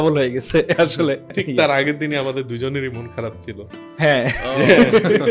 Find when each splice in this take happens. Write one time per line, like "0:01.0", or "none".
0:01.3

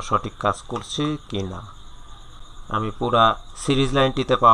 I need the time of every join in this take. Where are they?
0:02.5

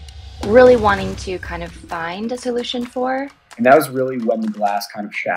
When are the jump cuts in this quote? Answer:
0:03.4

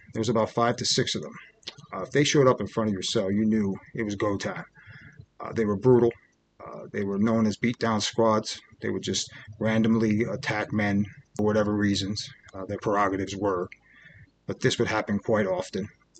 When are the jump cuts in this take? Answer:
none

